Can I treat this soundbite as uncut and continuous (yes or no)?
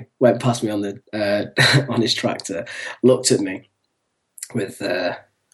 no